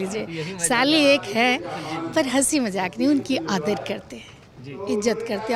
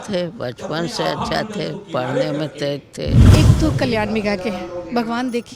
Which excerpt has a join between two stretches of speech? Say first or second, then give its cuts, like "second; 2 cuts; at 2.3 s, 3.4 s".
second; 1 cut; at 3.2 s